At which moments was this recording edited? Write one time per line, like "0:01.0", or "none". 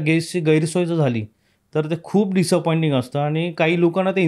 none